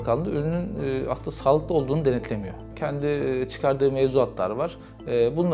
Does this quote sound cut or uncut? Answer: uncut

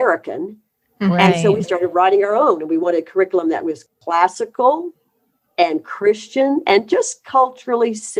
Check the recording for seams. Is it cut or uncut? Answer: uncut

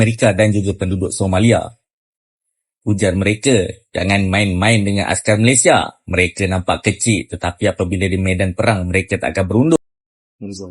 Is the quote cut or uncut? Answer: cut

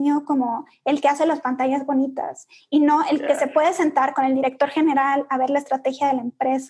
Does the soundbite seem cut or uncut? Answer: uncut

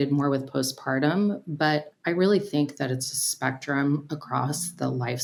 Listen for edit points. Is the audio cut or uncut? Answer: uncut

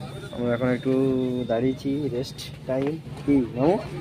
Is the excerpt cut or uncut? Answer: uncut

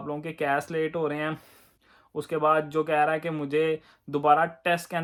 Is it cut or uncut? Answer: uncut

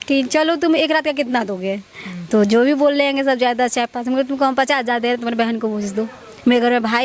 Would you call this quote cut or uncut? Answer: uncut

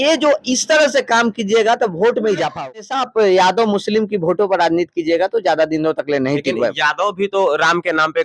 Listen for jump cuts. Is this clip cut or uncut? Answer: cut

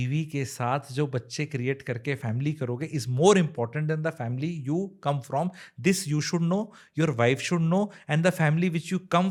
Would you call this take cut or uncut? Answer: uncut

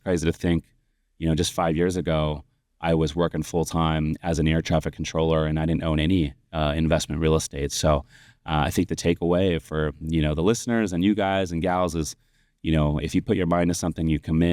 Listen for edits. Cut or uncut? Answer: uncut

